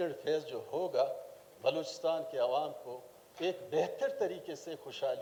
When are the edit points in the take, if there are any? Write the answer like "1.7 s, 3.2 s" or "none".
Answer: none